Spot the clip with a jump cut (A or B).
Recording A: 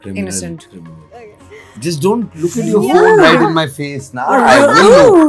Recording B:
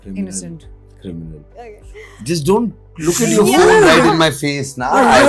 A